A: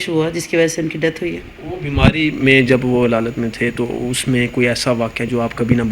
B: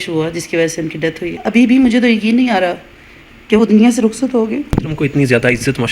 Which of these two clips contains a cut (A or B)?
B